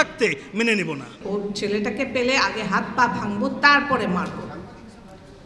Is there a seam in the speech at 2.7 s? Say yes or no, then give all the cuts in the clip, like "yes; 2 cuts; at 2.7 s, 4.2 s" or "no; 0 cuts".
no; 1 cut; at 1.1 s